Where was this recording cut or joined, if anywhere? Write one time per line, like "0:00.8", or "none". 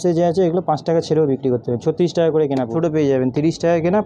0:02.7